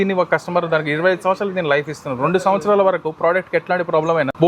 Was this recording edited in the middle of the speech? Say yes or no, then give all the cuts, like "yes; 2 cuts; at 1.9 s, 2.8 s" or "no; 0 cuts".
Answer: no; 0 cuts